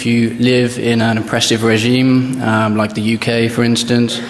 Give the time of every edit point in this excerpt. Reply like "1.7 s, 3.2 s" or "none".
none